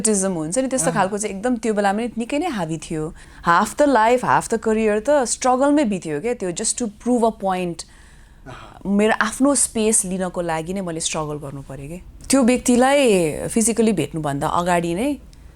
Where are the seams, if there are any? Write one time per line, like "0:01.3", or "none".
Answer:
0:03.2
0:12.1